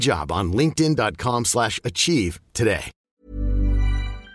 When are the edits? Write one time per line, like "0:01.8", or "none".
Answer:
0:03.1